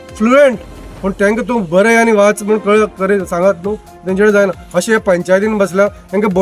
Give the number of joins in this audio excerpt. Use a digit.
0